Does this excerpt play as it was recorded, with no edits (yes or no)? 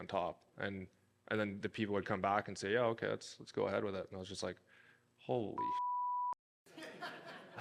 yes